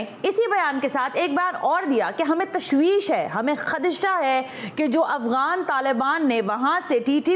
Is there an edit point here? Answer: no; 0 cuts

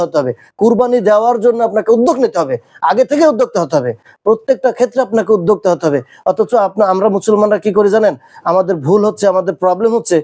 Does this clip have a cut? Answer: no; 0 cuts

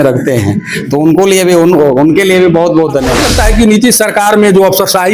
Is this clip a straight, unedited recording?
no; 1 cut; at 3.2 s

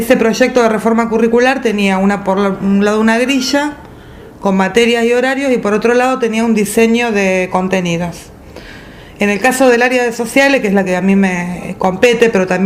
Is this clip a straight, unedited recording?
no; 1 cut; at 7.6 s

